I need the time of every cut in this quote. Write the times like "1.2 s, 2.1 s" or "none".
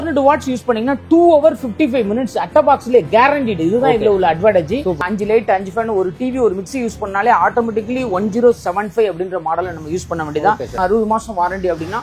5.0 s, 10.7 s